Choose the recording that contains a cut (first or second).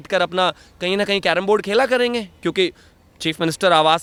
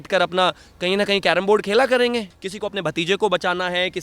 second